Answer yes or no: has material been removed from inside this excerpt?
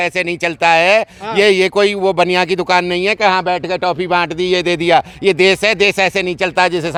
no